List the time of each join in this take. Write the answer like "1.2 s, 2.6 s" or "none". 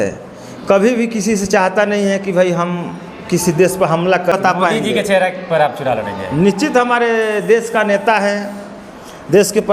4.3 s